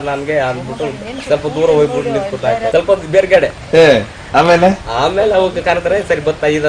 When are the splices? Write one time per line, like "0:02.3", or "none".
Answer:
0:02.6